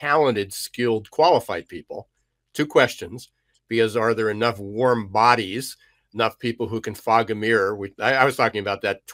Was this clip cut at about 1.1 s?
no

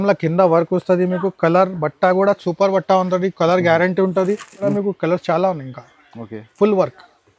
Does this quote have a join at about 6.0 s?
no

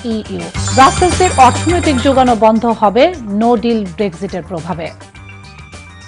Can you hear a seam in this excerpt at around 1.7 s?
no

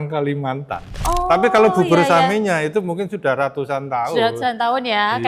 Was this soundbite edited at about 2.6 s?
no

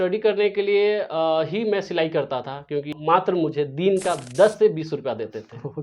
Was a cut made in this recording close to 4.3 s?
no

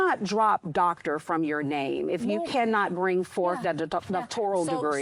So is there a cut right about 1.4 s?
no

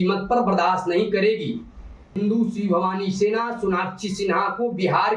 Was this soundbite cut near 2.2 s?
yes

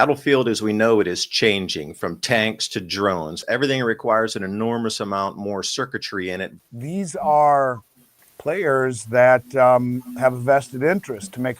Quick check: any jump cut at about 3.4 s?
yes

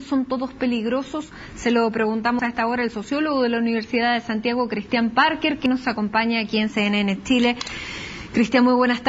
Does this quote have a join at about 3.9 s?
yes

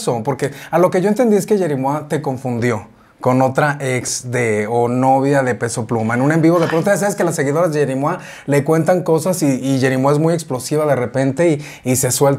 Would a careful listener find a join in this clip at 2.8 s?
no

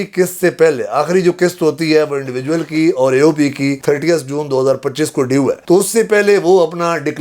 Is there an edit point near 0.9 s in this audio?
no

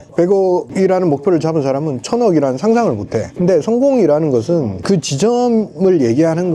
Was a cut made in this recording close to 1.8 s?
no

